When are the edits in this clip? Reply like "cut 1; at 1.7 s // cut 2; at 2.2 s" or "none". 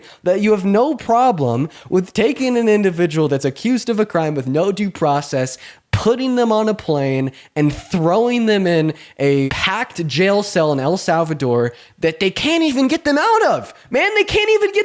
cut 1; at 9.5 s